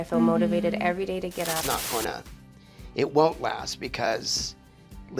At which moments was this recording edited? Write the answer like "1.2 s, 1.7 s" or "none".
1.5 s